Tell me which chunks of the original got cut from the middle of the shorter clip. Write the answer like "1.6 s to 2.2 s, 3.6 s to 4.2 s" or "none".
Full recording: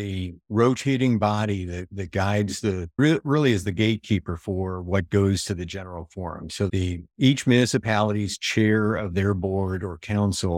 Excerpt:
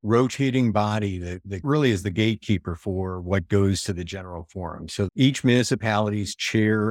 2.1 s to 3.2 s, 6.7 s to 7.1 s